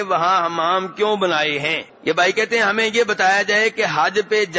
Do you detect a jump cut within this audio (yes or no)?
yes